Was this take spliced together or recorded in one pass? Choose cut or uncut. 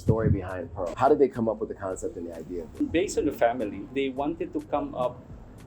cut